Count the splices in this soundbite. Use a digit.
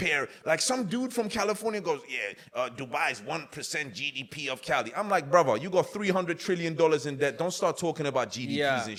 0